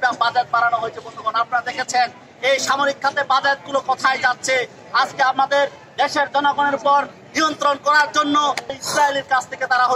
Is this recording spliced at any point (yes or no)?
yes